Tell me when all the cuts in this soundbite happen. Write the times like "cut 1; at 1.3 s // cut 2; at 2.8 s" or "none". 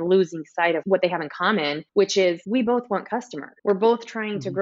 none